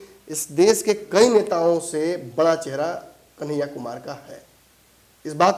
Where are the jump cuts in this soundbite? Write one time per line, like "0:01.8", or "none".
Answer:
none